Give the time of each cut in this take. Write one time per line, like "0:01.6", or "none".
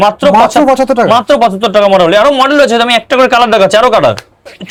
none